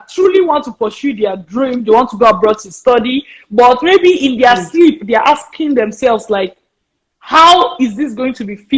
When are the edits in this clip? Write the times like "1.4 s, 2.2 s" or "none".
none